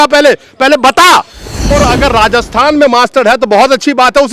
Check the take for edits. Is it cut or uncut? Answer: cut